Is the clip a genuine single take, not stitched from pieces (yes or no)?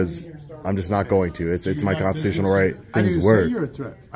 no